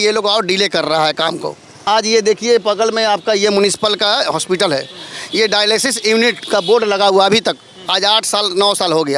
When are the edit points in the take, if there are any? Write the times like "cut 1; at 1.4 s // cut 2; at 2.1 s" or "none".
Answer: cut 1; at 1.7 s